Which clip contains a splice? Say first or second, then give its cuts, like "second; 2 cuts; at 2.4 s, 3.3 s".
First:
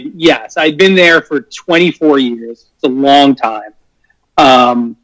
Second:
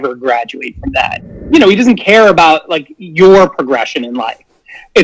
second; 1 cut; at 1.2 s